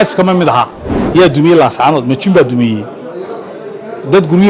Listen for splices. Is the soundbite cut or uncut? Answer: cut